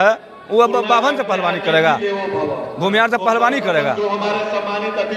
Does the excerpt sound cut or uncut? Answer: uncut